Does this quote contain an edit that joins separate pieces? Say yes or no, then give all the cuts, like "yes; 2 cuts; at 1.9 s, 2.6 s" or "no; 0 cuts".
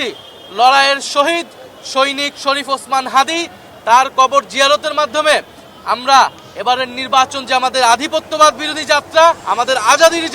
yes; 1 cut; at 9.4 s